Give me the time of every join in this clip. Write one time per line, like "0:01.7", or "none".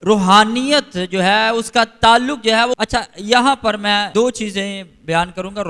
0:02.8
0:04.1